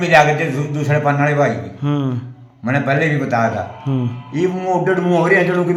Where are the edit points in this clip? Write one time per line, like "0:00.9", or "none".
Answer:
none